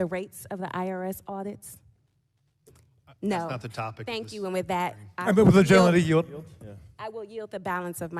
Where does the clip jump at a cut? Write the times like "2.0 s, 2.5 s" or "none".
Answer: none

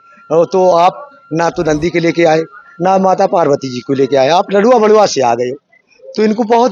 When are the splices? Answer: none

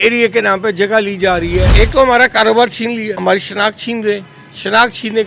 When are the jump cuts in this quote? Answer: 1.7 s, 3.1 s

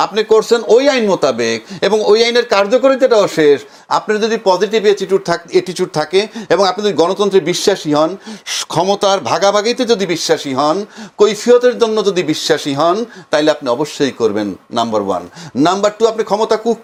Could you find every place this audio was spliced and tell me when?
none

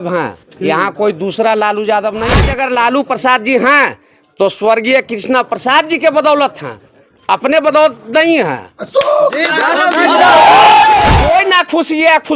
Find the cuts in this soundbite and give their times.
2.4 s, 11.1 s

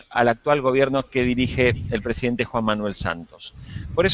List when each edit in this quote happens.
2.4 s

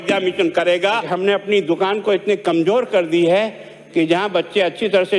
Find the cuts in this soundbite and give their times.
1.0 s

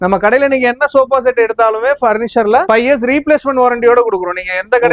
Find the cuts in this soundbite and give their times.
2.6 s

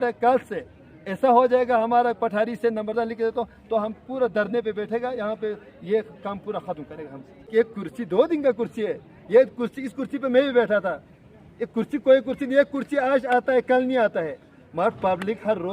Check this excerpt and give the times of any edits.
7.5 s

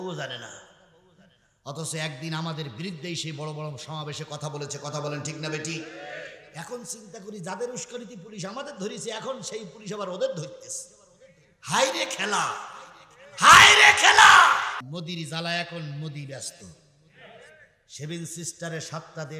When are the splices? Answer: 14.8 s

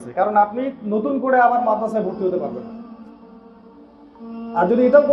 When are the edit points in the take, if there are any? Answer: none

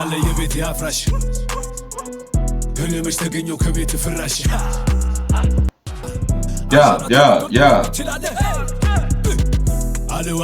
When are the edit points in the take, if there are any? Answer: 6.1 s

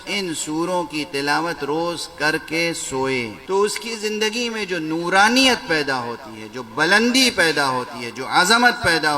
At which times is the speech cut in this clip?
3.4 s

